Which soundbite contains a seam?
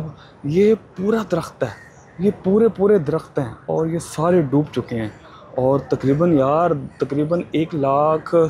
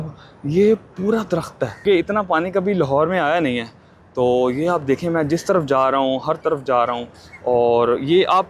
second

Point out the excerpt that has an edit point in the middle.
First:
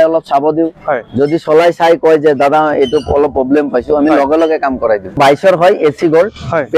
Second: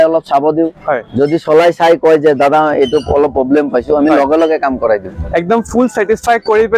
first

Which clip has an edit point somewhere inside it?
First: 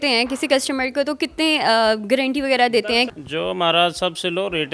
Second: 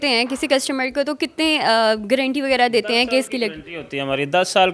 first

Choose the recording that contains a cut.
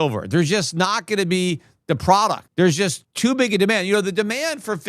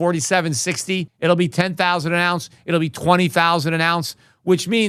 first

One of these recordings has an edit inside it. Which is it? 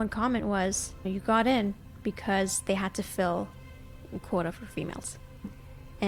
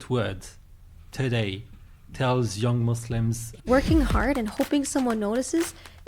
second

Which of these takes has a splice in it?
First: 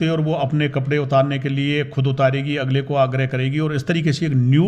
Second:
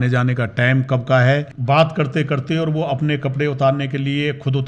second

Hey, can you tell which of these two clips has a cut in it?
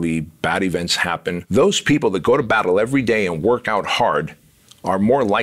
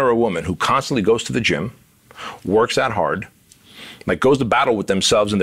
first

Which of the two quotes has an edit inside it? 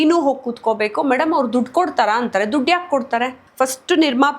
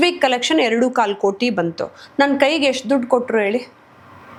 first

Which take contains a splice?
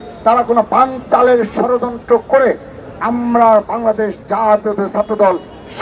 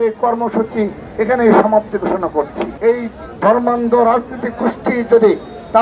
second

